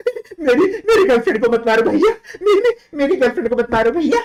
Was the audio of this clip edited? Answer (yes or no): no